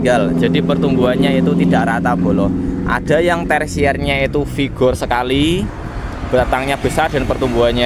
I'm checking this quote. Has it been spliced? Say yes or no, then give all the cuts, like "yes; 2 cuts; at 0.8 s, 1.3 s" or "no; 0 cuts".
no; 0 cuts